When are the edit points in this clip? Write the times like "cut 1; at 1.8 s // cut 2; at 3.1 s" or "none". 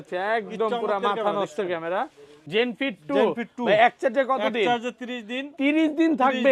cut 1; at 2.4 s